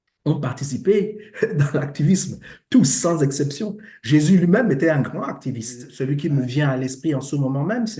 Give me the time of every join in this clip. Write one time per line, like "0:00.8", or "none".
0:05.8